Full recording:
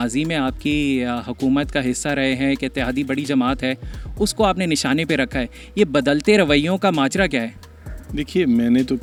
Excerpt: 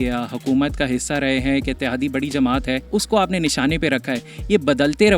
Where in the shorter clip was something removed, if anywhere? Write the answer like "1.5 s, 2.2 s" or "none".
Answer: 2.8 s